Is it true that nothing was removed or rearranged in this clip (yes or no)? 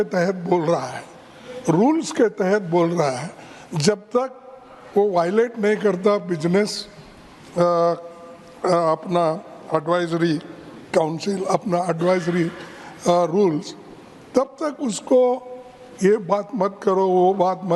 yes